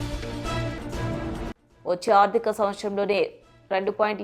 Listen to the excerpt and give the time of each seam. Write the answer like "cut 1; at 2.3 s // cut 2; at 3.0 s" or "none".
cut 1; at 1.5 s